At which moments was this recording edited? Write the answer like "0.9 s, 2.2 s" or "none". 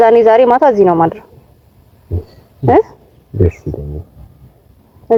none